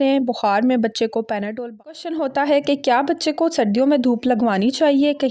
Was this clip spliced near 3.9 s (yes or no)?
no